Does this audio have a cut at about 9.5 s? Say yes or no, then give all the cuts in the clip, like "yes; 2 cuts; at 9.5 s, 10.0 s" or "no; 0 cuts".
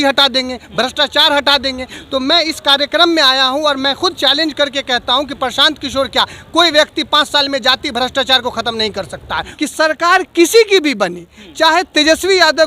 yes; 1 cut; at 9.5 s